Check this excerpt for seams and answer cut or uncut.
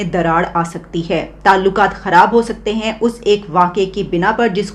uncut